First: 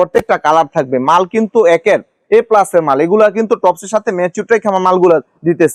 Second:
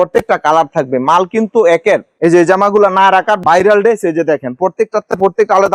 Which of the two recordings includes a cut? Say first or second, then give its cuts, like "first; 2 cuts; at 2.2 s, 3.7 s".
second; 1 cut; at 2.1 s